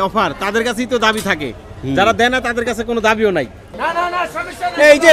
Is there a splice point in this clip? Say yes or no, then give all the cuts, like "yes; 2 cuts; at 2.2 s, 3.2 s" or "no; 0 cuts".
yes; 1 cut; at 3.7 s